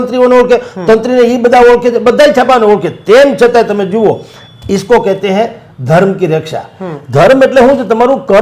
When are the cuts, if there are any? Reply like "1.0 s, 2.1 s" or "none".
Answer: none